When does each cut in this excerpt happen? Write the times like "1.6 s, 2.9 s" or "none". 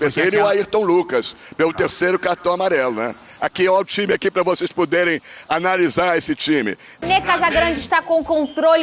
7.0 s